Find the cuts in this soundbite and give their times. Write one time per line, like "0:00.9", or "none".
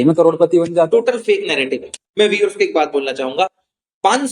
0:02.0